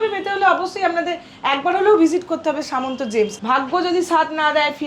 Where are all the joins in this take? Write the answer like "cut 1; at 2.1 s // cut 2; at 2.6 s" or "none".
cut 1; at 3.4 s